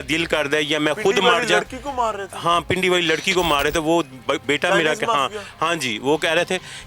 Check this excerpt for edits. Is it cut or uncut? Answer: uncut